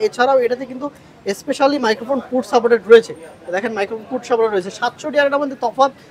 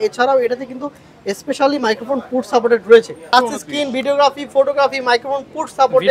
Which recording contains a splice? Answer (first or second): second